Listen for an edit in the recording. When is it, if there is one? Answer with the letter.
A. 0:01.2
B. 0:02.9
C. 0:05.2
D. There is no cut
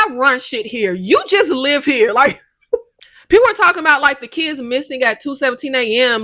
B